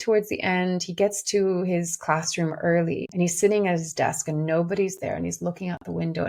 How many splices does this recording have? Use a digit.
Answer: 1